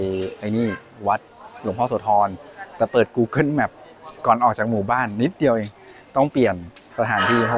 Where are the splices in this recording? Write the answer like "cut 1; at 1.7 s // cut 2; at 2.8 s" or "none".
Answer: none